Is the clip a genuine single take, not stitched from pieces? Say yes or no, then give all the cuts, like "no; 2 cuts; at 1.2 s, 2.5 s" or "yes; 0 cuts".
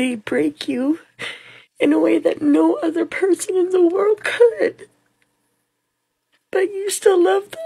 yes; 0 cuts